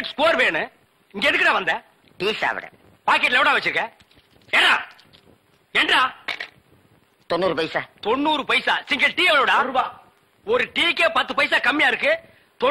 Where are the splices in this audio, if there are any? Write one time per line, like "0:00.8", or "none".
0:02.2